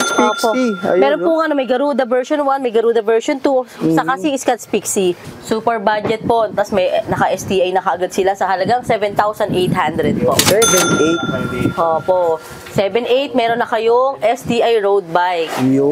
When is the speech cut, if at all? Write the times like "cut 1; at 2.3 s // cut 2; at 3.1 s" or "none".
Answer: cut 1; at 5.3 s